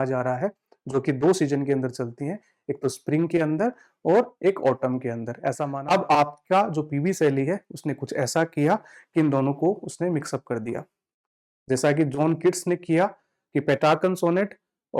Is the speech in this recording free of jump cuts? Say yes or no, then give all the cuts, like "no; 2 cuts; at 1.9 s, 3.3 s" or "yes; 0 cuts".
no; 1 cut; at 5.7 s